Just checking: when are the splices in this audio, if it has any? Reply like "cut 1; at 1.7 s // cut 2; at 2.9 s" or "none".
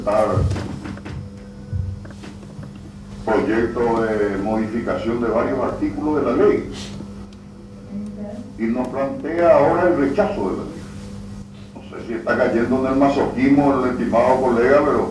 cut 1; at 11.7 s